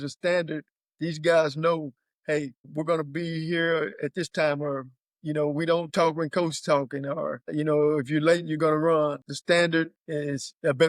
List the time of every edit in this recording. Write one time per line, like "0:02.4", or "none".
0:09.2
0:09.9